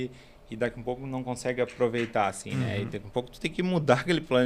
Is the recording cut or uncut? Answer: uncut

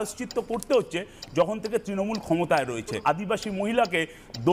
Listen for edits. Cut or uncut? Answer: cut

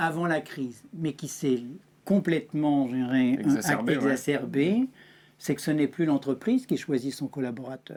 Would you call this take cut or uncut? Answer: uncut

